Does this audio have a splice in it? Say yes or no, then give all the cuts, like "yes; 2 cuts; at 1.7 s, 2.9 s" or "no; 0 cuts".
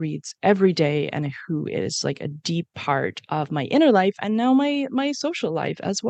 no; 0 cuts